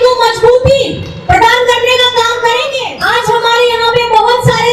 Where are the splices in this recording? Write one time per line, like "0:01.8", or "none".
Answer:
0:02.9